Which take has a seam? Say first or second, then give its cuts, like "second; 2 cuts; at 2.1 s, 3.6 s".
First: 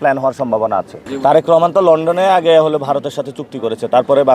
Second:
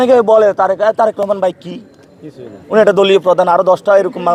first; 1 cut; at 1.0 s